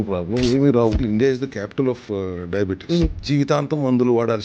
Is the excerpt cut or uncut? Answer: cut